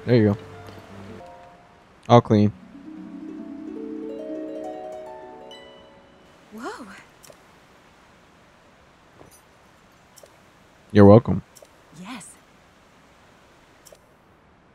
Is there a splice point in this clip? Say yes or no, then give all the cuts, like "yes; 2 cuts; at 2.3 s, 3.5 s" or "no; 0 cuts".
yes; 2 cuts; at 1.2 s, 10.1 s